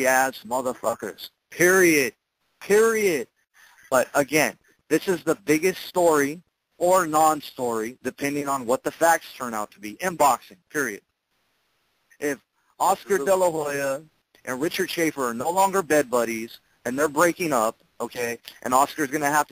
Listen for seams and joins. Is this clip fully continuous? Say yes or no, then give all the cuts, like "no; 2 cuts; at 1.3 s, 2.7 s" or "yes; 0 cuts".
no; 1 cut; at 3.4 s